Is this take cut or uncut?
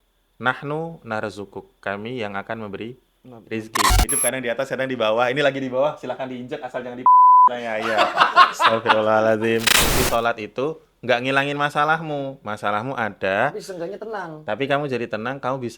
cut